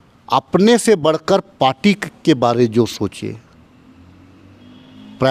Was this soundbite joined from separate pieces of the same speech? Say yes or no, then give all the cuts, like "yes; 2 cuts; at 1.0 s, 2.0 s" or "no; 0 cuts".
no; 0 cuts